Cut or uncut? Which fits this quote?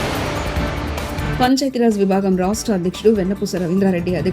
cut